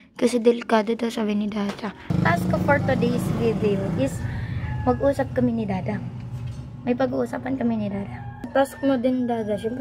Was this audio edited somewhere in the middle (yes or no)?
yes